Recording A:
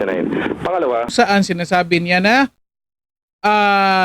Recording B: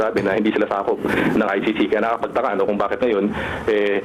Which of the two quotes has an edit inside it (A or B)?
A